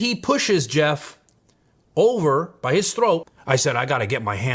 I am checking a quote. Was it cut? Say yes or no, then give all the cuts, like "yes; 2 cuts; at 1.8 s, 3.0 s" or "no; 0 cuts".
yes; 1 cut; at 3.3 s